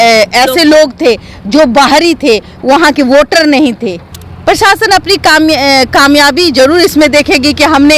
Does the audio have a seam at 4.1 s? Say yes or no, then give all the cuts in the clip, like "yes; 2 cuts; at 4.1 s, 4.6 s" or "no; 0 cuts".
yes; 1 cut; at 4.1 s